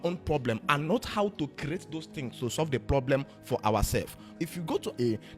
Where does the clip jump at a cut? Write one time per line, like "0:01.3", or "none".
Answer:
0:04.4